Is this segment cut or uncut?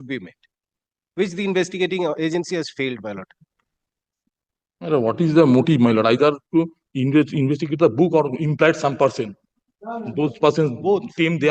uncut